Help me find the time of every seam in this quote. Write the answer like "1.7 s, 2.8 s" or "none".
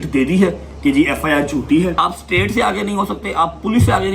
2.0 s

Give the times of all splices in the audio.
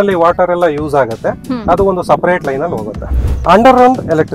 3.2 s

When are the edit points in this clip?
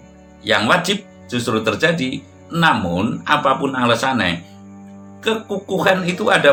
none

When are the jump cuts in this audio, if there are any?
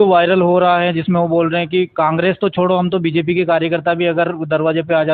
none

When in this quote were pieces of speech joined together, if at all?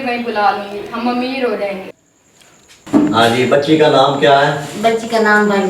2.4 s

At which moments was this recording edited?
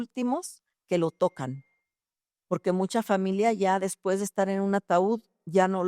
none

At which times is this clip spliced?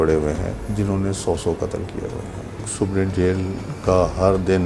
2.7 s

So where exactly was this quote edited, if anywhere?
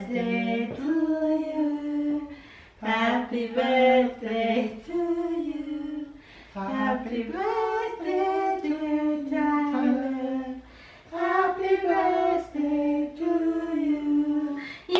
none

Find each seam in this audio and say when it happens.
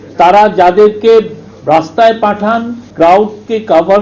2.8 s

